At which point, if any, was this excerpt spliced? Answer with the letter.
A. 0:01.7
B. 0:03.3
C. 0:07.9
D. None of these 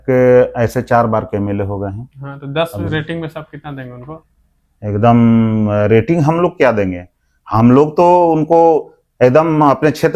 D